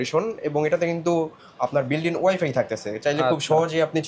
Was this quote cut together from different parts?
no; 0 cuts

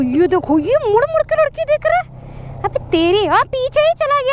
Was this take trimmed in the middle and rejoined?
no; 0 cuts

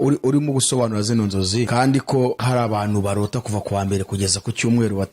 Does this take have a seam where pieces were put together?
yes; 2 cuts; at 1.7 s, 2.4 s

